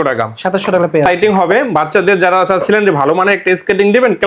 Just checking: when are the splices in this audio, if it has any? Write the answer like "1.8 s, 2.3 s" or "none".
1.1 s